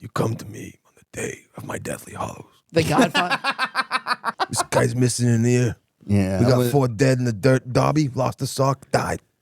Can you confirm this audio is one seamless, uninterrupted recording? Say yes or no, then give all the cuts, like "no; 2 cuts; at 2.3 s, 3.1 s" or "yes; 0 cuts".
no; 1 cut; at 4.3 s